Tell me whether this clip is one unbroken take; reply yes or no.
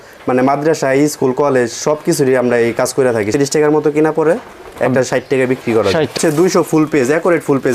no